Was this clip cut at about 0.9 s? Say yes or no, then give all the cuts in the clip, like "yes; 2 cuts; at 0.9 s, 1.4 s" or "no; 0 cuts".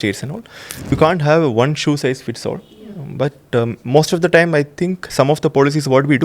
yes; 1 cut; at 0.9 s